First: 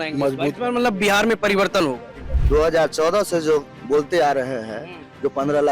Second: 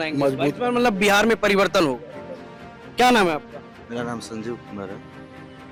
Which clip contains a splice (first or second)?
first